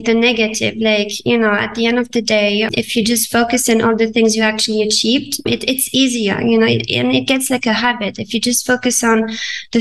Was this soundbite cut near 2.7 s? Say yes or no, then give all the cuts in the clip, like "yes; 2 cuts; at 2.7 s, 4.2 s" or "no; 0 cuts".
yes; 2 cuts; at 2.7 s, 5.5 s